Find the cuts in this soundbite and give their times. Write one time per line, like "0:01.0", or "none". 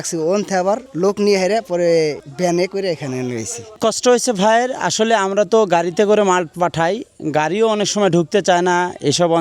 0:00.9
0:02.3
0:03.8

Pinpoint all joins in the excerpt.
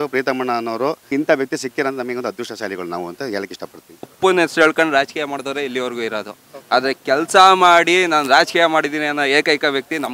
0:01.0
0:04.1

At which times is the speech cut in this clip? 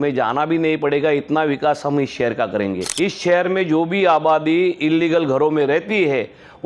0:02.8

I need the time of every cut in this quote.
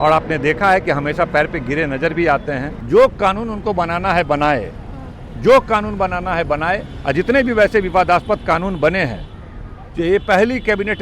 0:02.7

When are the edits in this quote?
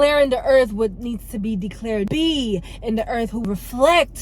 0:02.1
0:03.4

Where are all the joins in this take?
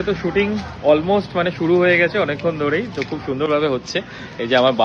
none

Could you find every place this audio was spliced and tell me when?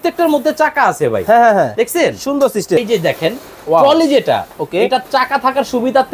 0:02.8

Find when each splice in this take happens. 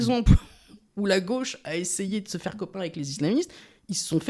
none

